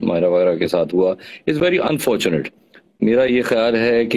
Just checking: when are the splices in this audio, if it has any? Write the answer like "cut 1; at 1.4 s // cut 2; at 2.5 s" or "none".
none